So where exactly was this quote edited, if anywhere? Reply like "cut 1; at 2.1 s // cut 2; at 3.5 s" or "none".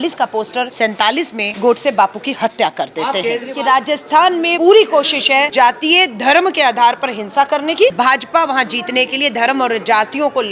cut 1; at 1.0 s // cut 2; at 3.5 s // cut 3; at 4.5 s // cut 4; at 5.5 s // cut 5; at 7.9 s